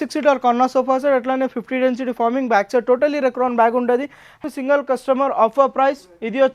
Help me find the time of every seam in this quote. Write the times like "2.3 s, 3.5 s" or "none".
4.4 s